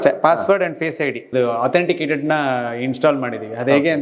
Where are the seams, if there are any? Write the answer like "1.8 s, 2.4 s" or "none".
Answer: 1.3 s